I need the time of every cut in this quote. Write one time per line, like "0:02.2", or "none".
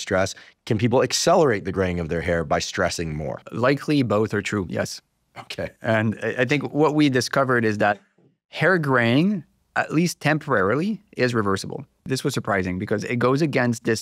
0:03.4
0:12.0